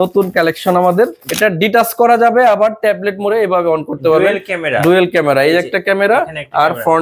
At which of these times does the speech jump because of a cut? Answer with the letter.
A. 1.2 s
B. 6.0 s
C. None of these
A